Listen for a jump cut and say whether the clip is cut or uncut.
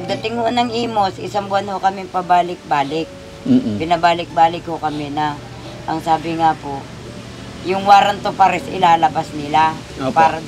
uncut